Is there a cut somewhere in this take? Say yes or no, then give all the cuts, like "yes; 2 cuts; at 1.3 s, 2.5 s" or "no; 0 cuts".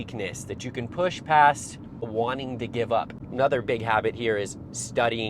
yes; 2 cuts; at 2.1 s, 3.1 s